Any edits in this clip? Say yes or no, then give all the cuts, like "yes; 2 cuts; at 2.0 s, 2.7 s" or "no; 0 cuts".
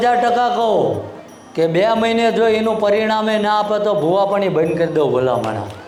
no; 0 cuts